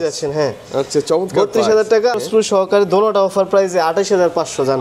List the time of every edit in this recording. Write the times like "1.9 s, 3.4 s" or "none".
2.2 s